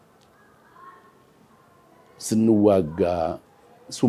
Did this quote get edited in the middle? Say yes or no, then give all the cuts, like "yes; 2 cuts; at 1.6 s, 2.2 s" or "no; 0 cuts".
no; 0 cuts